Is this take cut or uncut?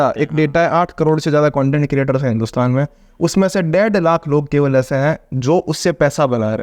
uncut